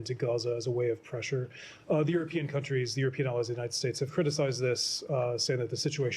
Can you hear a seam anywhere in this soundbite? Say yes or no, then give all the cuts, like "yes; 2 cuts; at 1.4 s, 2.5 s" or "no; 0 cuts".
no; 0 cuts